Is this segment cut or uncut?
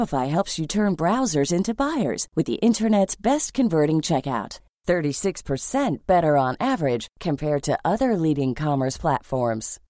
uncut